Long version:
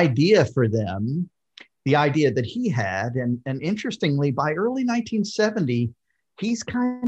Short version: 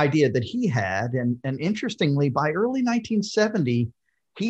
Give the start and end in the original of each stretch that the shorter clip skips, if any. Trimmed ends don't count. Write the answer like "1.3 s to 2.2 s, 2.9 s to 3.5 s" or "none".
none